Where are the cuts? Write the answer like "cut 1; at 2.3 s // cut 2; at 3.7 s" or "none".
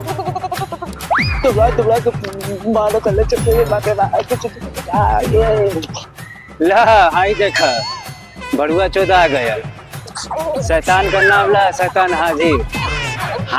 none